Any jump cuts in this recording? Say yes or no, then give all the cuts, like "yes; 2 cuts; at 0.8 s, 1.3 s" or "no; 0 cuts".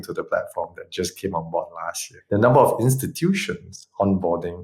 yes; 1 cut; at 2.1 s